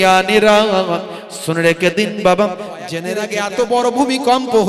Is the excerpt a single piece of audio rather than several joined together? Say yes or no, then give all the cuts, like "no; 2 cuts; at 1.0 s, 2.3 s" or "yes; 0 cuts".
no; 1 cut; at 3.1 s